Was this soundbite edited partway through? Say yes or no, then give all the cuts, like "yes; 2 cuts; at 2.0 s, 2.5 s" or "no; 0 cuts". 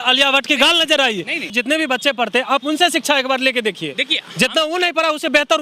yes; 1 cut; at 1.5 s